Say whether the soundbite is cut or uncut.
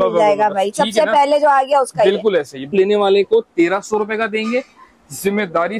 cut